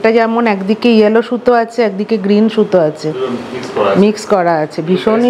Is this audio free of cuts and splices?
yes; 0 cuts

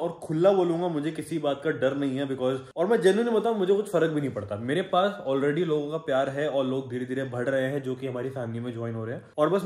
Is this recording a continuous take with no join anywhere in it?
yes; 0 cuts

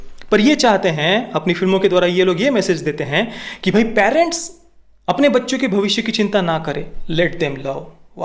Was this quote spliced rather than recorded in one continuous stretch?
yes; 1 cut; at 7.0 s

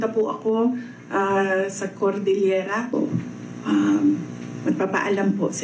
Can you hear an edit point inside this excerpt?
yes; 1 cut; at 2.9 s

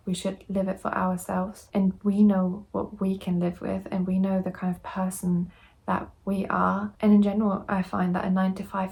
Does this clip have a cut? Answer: no; 0 cuts

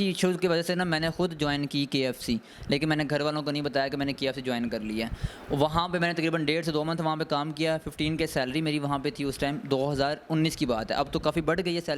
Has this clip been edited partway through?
no; 0 cuts

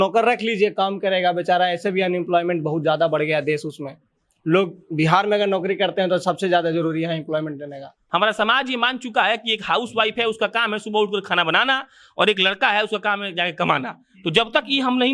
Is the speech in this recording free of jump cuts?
no; 1 cut; at 8.0 s

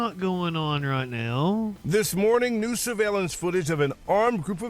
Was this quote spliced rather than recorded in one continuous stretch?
yes; 1 cut; at 1.8 s

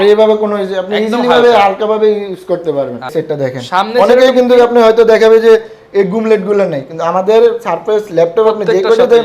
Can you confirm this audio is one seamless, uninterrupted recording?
no; 1 cut; at 3.1 s

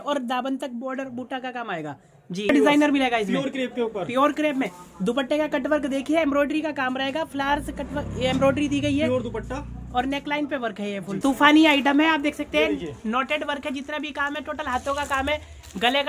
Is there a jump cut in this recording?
yes; 2 cuts; at 2.5 s, 11.1 s

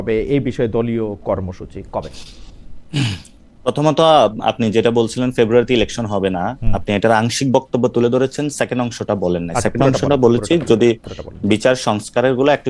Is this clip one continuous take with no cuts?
yes; 0 cuts

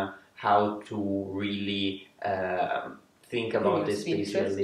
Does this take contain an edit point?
no; 0 cuts

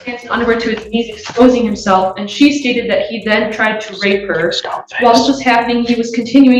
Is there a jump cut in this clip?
no; 0 cuts

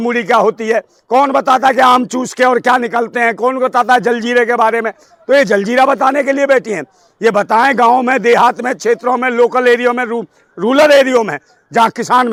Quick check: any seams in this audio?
no; 0 cuts

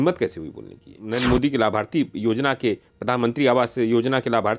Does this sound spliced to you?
yes; 1 cut; at 1.0 s

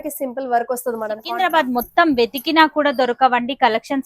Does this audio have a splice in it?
yes; 1 cut; at 1.2 s

